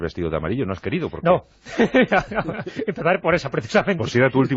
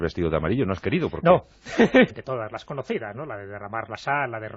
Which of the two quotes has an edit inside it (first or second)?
first